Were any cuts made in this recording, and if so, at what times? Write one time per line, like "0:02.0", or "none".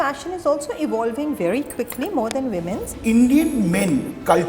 0:02.9